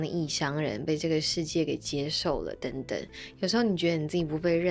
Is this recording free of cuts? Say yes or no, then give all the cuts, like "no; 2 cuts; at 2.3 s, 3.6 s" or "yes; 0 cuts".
yes; 0 cuts